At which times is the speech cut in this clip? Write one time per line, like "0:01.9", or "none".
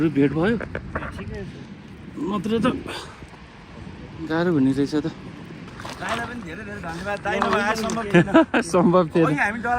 0:05.7